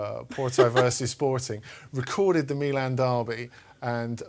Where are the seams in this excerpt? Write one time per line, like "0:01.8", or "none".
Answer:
0:01.3